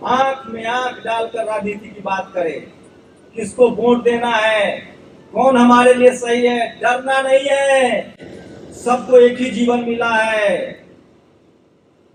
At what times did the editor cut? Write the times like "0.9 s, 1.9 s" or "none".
none